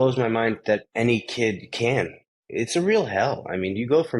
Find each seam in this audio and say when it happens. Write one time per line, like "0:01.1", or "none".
0:00.9
0:02.2